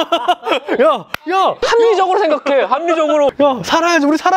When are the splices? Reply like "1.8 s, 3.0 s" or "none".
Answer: 3.3 s